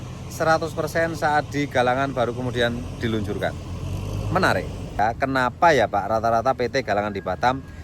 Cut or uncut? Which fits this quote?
cut